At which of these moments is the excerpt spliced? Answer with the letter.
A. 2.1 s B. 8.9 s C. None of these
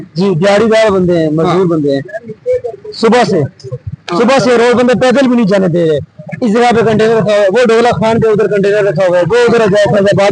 C